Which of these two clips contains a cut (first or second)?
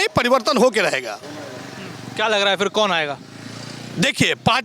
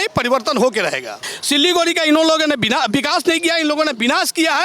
second